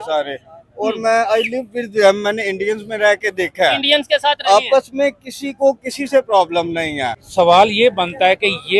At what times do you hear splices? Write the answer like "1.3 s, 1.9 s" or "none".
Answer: 7.1 s